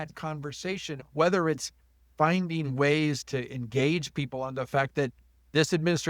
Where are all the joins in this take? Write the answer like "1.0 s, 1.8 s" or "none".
1.0 s, 3.2 s